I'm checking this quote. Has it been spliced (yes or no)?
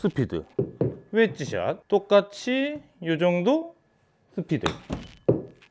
yes